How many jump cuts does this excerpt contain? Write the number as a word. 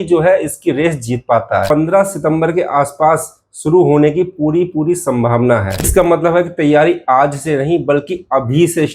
two